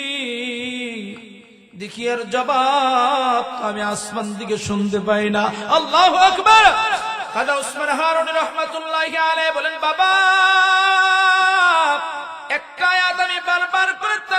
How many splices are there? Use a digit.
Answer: 0